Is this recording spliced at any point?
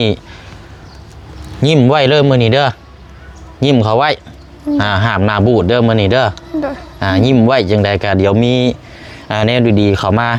no; 0 cuts

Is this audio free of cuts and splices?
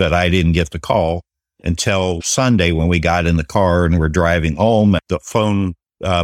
yes; 0 cuts

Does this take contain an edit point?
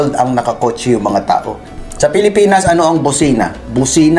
yes; 1 cut; at 1.6 s

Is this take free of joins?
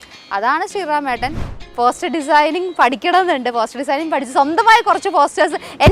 no; 1 cut; at 1.6 s

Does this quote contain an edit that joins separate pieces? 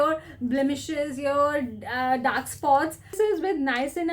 yes; 1 cut; at 3.1 s

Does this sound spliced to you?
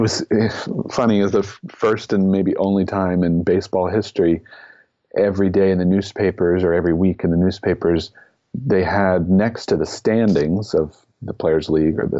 no; 0 cuts

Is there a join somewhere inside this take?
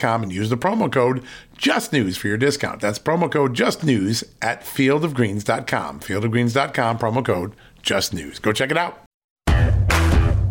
yes; 1 cut; at 9.3 s

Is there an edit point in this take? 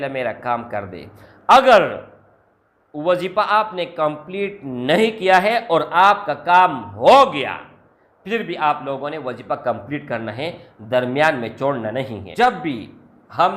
yes; 1 cut; at 12.2 s

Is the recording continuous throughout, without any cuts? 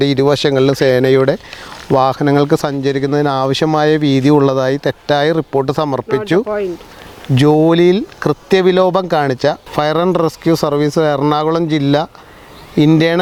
yes; 0 cuts

